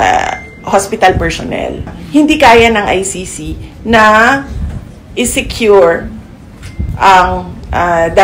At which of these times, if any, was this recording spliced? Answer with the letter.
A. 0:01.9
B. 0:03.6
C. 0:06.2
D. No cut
A